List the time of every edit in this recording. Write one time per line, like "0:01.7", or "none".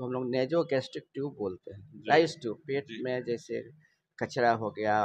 none